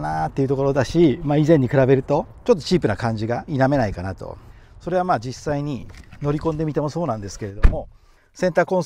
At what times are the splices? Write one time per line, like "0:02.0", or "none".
none